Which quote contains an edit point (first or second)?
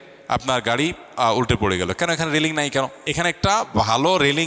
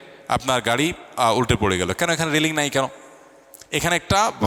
first